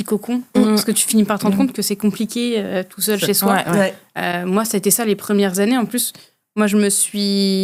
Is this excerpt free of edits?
yes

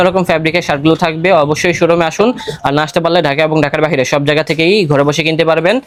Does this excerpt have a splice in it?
no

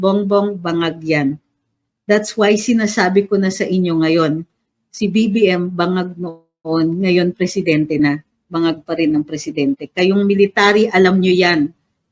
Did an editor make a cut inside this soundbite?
no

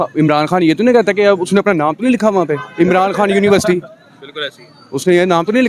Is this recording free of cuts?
yes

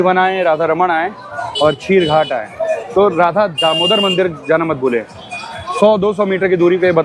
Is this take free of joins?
yes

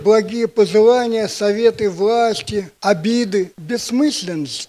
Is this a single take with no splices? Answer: no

